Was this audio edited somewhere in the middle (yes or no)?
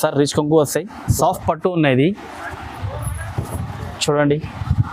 yes